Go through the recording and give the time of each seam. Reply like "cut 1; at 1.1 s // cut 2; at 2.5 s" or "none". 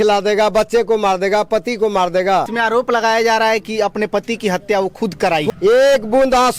cut 1; at 2.5 s // cut 2; at 5.4 s